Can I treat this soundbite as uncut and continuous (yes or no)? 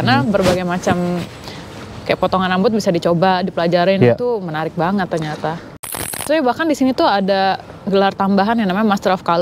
no